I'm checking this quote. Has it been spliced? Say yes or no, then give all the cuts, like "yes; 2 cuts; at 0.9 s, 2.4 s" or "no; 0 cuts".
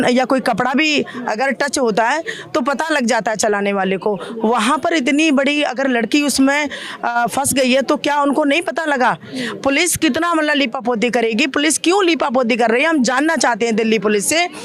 no; 0 cuts